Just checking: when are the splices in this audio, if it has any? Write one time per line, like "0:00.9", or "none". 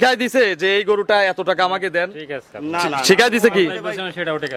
none